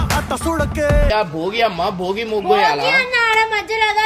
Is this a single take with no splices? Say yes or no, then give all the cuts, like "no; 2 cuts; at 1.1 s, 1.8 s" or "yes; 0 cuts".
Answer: no; 1 cut; at 1.1 s